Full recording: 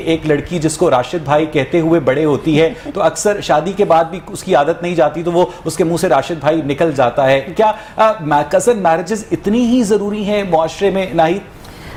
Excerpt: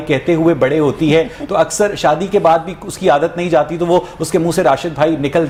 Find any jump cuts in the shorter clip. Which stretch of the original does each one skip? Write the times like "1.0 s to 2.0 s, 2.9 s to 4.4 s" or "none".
none